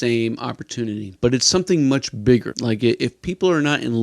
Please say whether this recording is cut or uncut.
cut